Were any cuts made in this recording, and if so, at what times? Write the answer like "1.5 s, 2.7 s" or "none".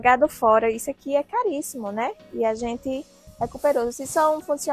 3.2 s